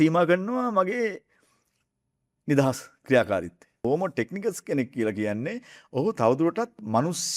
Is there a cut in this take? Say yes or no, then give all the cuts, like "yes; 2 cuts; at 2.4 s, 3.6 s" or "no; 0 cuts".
yes; 1 cut; at 3.8 s